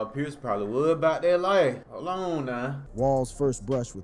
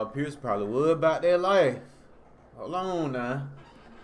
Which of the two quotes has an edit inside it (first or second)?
first